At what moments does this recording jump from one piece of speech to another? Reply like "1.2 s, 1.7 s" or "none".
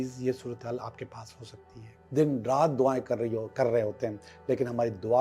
1.9 s